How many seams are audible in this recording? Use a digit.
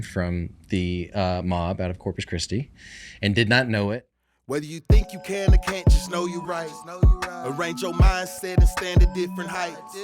1